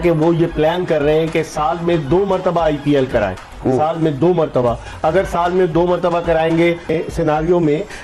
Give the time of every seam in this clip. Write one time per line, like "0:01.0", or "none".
0:06.9

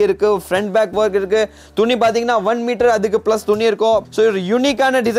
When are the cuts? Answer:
0:04.1

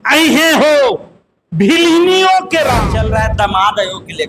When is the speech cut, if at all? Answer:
0:03.0

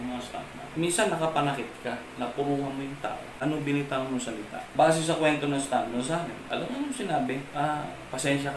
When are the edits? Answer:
0:03.3
0:04.6
0:06.4
0:07.5

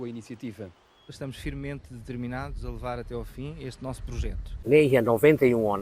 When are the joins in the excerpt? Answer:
0:04.5

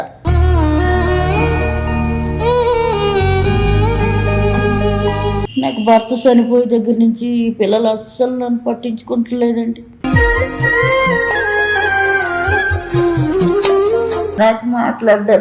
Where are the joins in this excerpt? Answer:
0:05.5
0:14.3

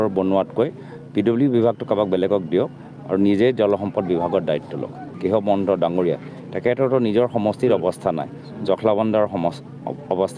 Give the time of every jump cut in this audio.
0:05.1

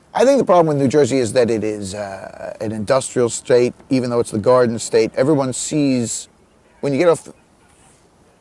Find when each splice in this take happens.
0:05.5

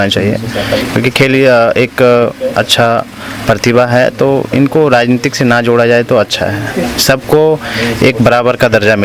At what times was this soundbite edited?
none

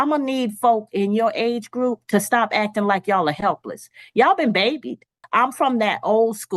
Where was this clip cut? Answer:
0:05.2

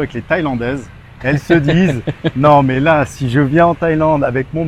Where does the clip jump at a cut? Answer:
none

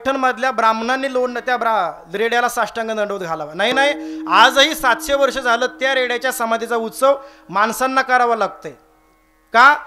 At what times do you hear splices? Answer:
none

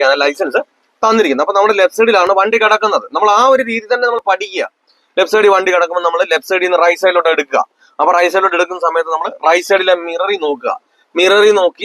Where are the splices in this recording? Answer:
none

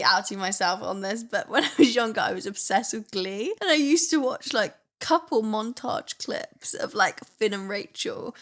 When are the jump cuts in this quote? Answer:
0:03.6

